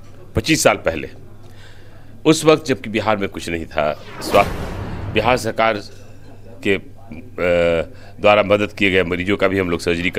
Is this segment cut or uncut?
cut